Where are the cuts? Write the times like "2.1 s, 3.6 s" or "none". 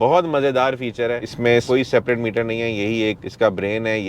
1.2 s

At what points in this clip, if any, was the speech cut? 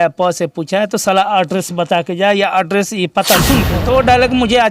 3.8 s

